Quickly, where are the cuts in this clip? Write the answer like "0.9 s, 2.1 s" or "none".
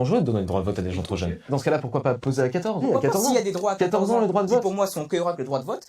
1.5 s, 2.8 s